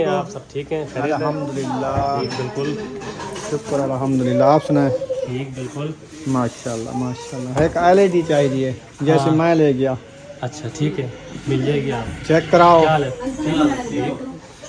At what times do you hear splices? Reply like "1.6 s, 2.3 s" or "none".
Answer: none